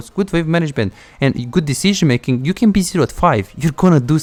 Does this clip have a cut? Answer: no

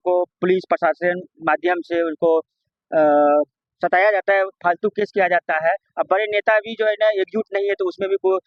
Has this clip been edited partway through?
no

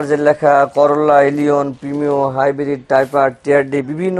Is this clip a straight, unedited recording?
yes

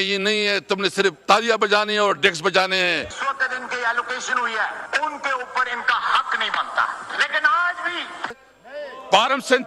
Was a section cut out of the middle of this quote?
yes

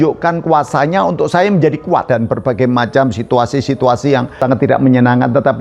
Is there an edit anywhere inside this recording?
yes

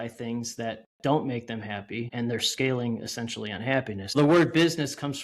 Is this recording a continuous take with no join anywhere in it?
no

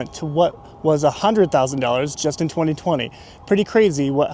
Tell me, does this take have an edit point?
no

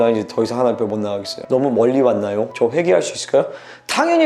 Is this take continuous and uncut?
no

